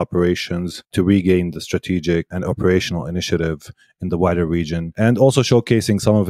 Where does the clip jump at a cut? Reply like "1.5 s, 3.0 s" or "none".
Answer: 0.9 s, 2.3 s, 4.8 s